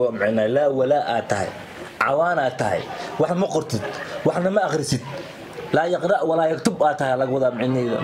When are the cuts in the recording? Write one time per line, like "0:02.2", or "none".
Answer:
none